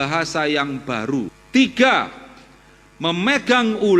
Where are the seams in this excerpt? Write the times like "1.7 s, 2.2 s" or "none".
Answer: 1.4 s